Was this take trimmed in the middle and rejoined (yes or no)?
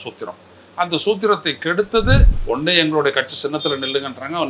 yes